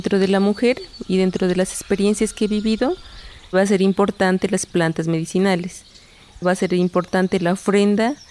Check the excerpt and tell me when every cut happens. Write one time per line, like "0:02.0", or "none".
0:03.5
0:06.4